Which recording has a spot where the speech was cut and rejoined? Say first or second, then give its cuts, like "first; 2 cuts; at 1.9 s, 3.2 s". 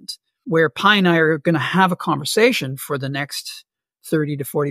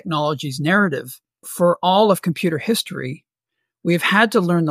second; 1 cut; at 1.4 s